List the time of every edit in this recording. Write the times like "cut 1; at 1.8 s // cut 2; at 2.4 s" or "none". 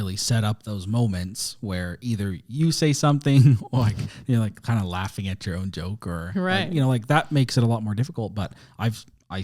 none